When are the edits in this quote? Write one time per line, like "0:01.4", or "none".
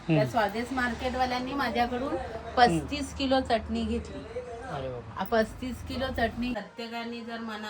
0:06.5